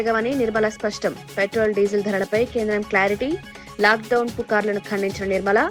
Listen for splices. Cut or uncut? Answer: uncut